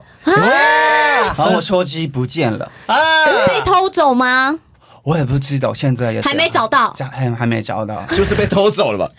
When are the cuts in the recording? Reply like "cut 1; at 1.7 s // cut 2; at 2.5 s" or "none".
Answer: none